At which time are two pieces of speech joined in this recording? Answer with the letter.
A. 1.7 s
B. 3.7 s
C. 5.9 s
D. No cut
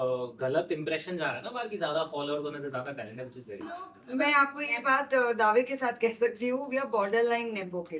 B